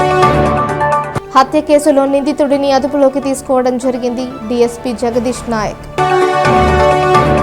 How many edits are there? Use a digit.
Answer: 0